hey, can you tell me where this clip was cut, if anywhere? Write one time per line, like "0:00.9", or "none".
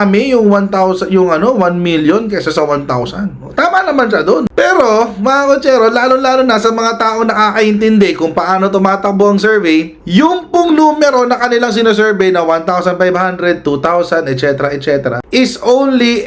0:04.5